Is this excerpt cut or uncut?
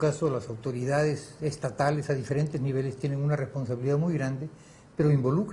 uncut